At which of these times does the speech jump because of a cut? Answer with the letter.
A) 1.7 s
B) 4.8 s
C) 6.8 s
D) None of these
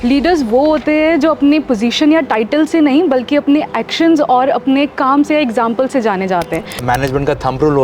C